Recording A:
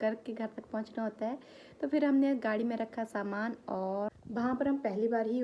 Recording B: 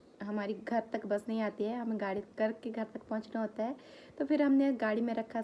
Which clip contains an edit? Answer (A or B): A